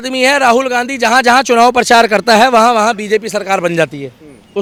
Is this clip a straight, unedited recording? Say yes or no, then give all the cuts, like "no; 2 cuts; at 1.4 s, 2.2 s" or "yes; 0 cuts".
yes; 0 cuts